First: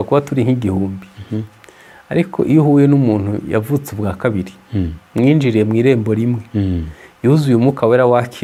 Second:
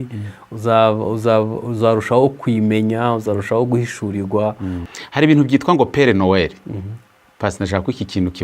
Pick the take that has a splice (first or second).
second